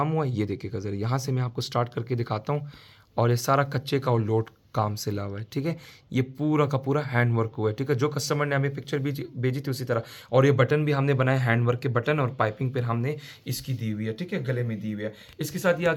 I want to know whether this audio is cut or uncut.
uncut